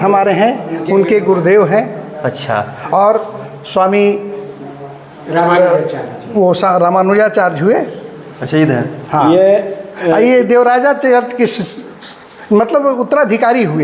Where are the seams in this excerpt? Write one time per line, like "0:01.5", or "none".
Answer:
none